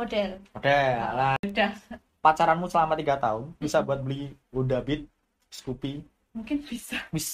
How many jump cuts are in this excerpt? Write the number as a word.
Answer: one